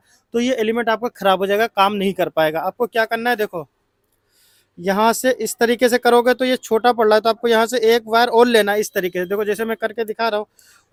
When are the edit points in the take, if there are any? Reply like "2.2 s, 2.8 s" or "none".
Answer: none